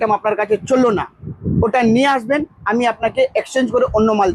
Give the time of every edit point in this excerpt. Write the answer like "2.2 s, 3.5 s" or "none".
none